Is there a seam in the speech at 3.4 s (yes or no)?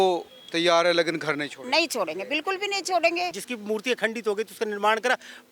yes